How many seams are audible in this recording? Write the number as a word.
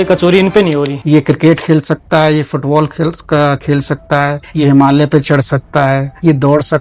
one